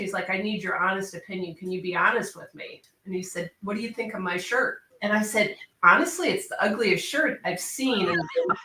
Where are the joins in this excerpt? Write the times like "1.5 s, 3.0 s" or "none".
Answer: 2.8 s, 4.9 s